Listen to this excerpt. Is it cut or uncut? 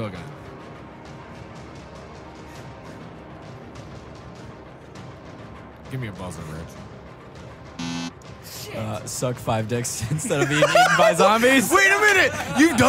uncut